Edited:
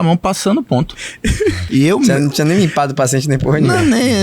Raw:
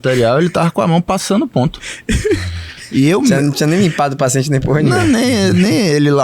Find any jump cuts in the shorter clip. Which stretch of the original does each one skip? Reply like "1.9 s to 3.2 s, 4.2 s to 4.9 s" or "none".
2.5 s to 2.8 s